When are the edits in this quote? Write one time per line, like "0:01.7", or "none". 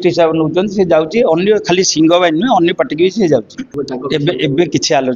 0:03.7

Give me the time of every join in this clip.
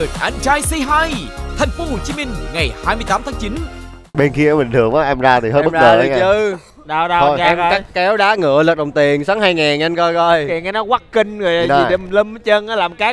0:04.0

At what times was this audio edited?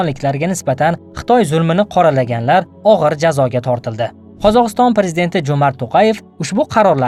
none

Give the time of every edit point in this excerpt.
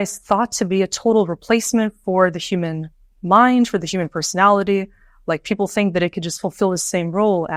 none

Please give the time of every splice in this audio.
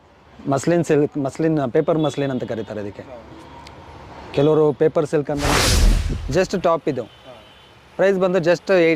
0:05.7

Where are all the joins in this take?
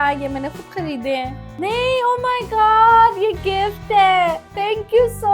0:01.5

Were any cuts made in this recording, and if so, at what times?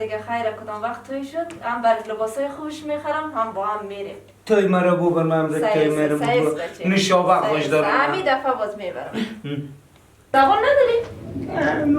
0:10.3

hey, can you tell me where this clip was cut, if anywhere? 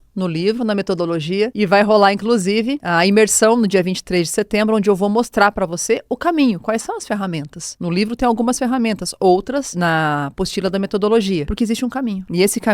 0:11.5

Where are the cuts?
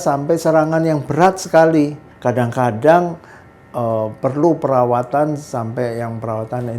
0:02.1

